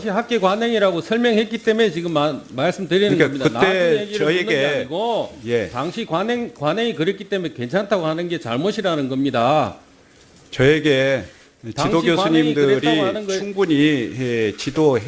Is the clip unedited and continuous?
no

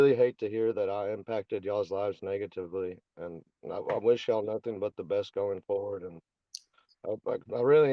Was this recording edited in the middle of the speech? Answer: no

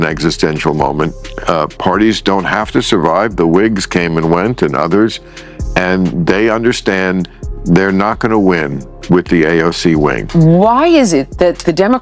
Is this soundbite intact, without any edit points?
no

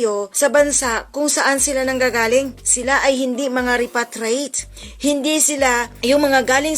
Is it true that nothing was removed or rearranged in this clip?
yes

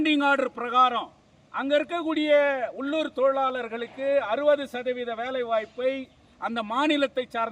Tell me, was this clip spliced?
no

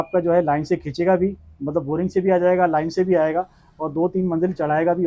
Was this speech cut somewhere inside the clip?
no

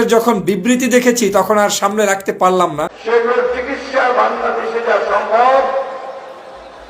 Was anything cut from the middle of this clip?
yes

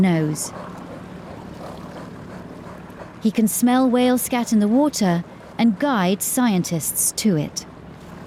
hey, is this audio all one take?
yes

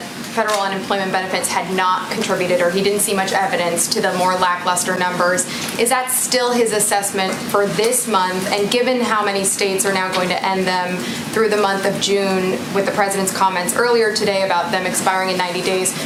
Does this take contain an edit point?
no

